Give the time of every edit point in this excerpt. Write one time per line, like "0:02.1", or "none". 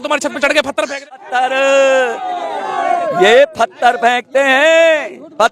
0:01.1